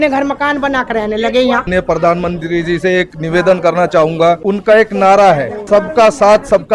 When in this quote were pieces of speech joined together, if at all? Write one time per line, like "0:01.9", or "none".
0:01.7
0:04.4
0:05.6

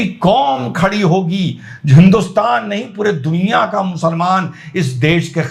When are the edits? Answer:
none

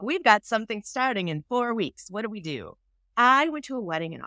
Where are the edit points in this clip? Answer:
0:03.0

